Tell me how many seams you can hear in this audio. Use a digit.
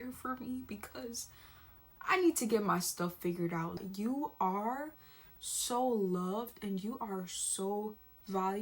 1